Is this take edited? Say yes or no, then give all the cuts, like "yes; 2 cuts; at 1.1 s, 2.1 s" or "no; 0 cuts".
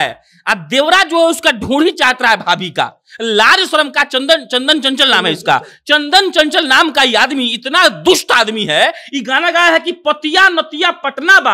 no; 0 cuts